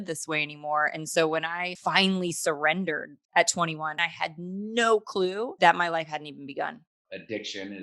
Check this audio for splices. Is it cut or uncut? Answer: cut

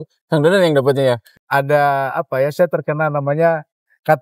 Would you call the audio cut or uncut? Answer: cut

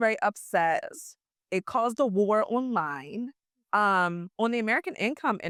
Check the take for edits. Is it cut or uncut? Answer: uncut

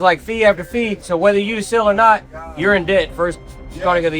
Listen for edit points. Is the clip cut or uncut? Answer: cut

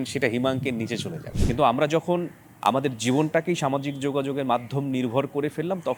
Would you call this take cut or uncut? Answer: cut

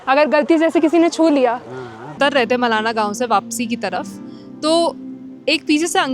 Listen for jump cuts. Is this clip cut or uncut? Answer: cut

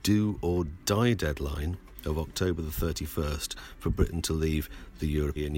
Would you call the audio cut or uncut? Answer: uncut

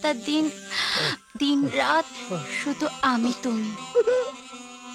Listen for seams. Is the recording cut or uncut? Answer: uncut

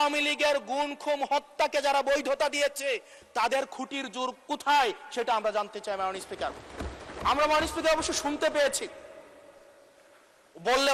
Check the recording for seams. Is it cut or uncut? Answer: uncut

